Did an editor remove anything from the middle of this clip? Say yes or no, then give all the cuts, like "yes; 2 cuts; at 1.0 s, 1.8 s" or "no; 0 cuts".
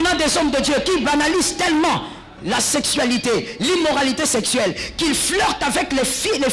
no; 0 cuts